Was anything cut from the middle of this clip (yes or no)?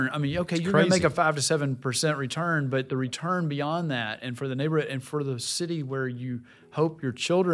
no